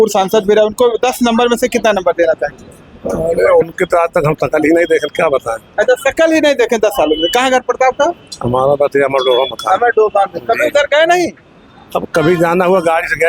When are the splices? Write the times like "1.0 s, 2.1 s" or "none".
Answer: none